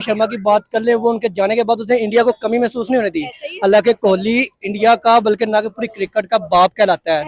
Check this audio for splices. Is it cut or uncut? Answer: uncut